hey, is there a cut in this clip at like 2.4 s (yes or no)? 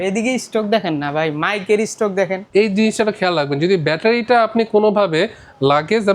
yes